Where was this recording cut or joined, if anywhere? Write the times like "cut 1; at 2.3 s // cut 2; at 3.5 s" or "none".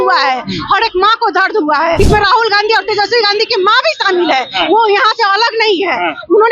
cut 1; at 2.0 s